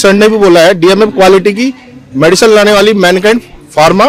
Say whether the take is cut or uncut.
uncut